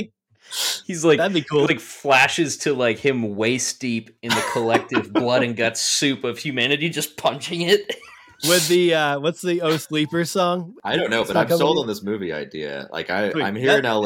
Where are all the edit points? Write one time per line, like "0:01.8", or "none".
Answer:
0:10.8